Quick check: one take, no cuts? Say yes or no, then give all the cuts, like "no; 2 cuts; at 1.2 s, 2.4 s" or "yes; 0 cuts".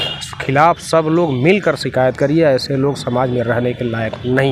yes; 0 cuts